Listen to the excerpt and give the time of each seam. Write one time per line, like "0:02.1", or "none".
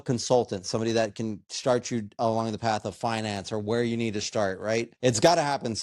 0:04.9

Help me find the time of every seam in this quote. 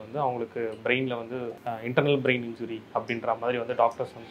0:01.6

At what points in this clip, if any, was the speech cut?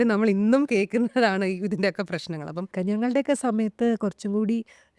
0:02.7

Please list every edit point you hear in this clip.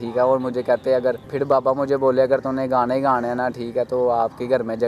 0:01.2

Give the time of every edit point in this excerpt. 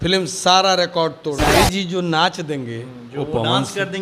0:01.5

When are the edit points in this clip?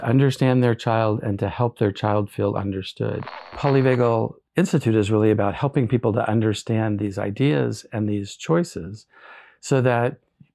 0:03.6

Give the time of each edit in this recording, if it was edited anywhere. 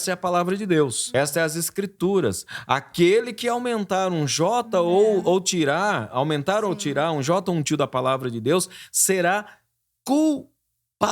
0:01.0

